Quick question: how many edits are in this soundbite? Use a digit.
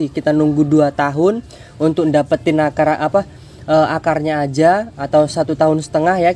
0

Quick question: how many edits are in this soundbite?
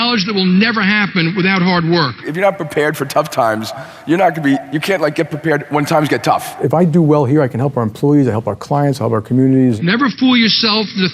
3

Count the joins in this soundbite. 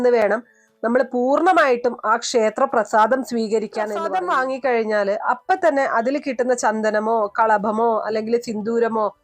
1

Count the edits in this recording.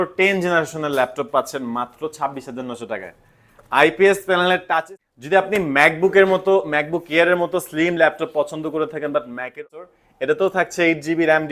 2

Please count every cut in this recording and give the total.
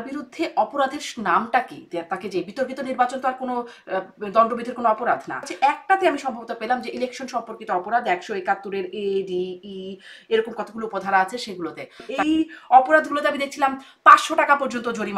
2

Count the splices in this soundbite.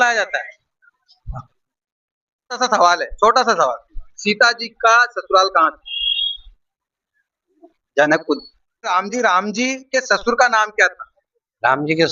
2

